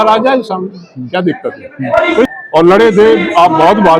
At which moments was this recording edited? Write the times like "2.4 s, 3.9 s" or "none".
2.2 s